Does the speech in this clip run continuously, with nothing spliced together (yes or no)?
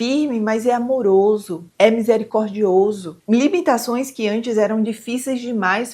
no